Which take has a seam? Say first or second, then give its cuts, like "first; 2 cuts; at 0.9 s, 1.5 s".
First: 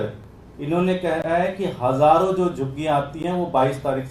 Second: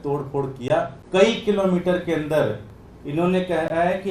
second; 1 cut; at 1.0 s